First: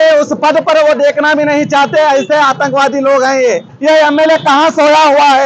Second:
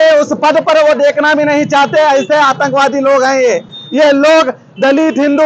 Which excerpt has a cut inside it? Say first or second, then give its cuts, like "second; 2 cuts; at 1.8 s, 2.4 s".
first; 1 cut; at 3.7 s